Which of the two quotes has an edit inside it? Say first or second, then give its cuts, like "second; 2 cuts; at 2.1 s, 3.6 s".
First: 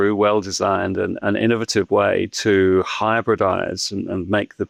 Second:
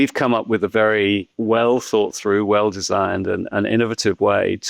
second; 1 cut; at 1.3 s